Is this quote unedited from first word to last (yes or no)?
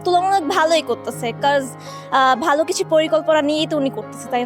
yes